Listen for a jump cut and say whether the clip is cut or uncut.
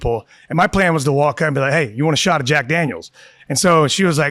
uncut